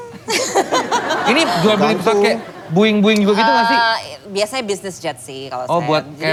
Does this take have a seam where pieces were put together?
no; 0 cuts

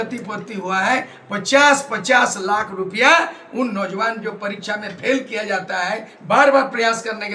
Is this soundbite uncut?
yes; 0 cuts

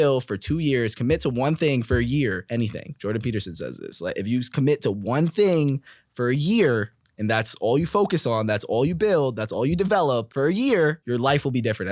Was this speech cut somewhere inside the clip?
yes; 3 cuts; at 2.4 s, 10.3 s, 11.0 s

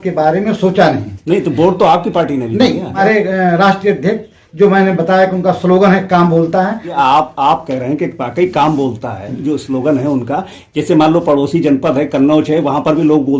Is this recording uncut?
no; 2 cuts; at 3.0 s, 6.9 s

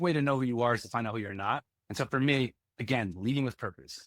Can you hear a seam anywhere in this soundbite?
yes; 2 cuts; at 1.8 s, 2.7 s

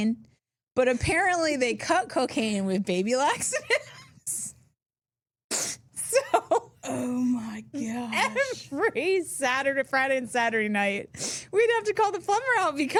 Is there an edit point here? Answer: no; 0 cuts

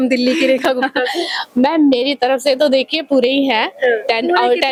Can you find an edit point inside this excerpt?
no; 0 cuts

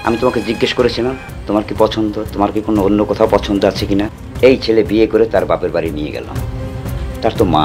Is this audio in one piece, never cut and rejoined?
no; 2 cuts; at 1.3 s, 4.2 s

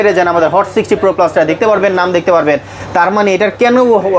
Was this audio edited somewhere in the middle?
no; 0 cuts

